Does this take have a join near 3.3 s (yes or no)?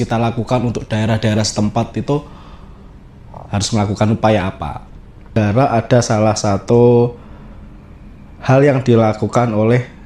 no